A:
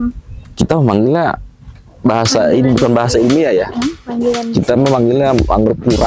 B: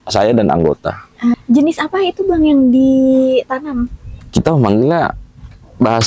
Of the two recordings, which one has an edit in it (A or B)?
B